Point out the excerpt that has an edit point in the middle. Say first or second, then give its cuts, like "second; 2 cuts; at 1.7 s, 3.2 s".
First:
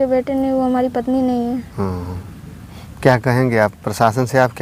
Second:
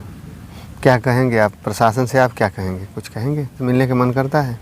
second; 1 cut; at 3.6 s